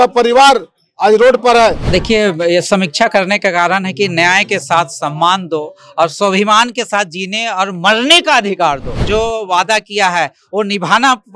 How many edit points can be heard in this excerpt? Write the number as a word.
two